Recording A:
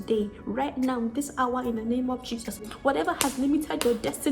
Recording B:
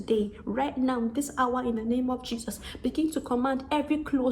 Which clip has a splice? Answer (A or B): A